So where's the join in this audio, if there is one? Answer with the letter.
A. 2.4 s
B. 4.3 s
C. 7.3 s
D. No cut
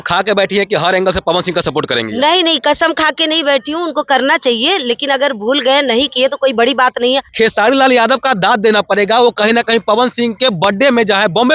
C